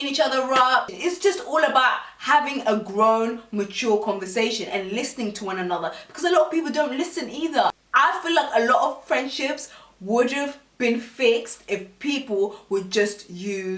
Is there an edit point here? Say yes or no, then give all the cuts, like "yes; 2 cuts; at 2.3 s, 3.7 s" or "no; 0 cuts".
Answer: yes; 1 cut; at 0.9 s